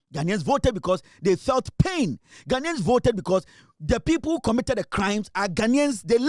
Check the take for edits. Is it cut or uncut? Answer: uncut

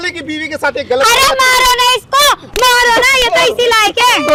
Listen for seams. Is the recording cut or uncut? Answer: uncut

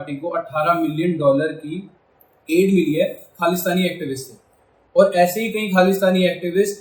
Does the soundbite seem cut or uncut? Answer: uncut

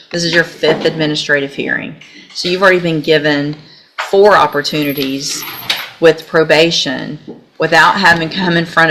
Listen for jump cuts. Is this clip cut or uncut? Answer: uncut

